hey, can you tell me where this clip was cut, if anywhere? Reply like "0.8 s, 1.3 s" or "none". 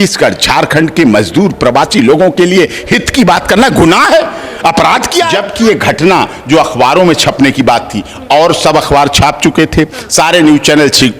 5.5 s

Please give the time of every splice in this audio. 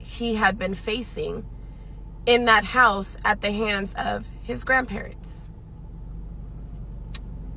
none

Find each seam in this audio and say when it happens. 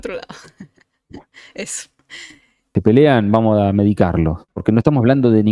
2.6 s, 4.5 s

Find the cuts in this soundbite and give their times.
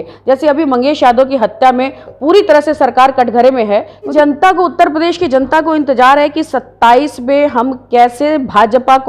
4.1 s

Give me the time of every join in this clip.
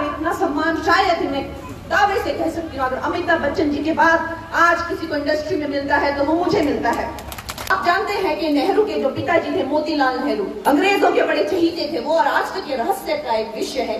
7.7 s, 10.5 s

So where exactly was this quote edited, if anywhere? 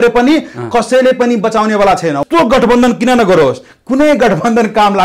2.2 s

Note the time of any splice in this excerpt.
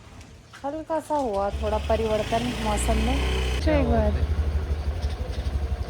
3.6 s

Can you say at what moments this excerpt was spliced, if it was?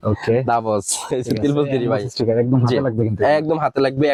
none

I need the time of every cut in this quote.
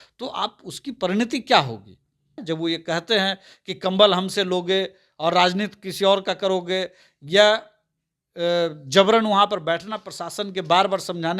2.4 s

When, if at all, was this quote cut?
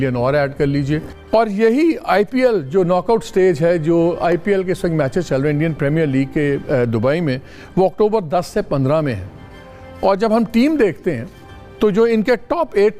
1.1 s

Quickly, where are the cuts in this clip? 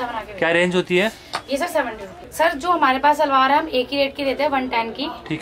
2.2 s

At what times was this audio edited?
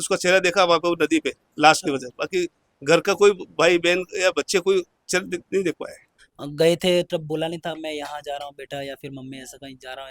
6.2 s

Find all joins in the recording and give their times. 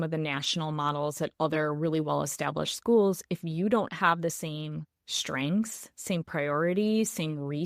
none

